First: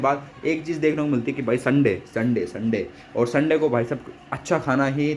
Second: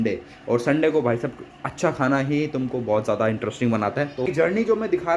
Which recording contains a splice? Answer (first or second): second